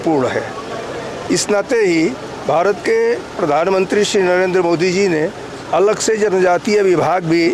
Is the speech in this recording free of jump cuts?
yes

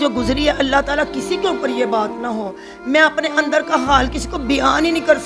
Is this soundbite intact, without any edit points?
yes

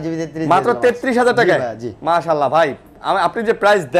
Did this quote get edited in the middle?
no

